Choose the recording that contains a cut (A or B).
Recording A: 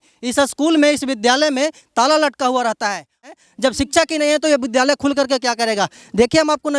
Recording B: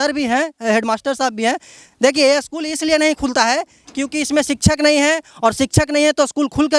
A